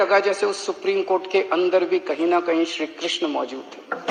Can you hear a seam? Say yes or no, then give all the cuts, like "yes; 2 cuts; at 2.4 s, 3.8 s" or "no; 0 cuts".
no; 0 cuts